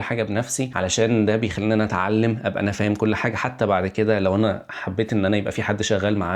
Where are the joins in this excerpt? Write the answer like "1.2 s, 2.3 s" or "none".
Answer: none